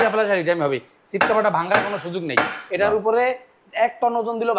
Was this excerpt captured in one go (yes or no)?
yes